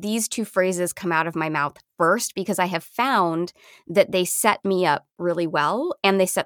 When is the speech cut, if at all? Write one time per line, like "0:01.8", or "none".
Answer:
none